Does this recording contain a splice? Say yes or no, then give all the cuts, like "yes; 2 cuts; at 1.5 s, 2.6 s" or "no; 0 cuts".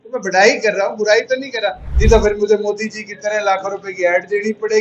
yes; 1 cut; at 1.9 s